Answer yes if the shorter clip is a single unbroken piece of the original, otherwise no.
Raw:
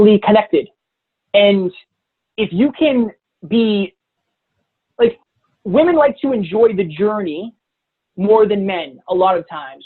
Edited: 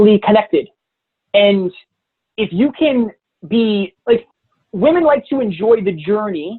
no